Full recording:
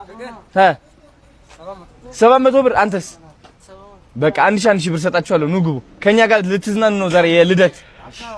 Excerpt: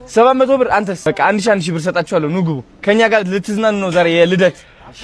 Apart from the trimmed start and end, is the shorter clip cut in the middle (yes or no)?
yes